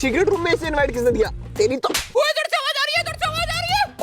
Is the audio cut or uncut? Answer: cut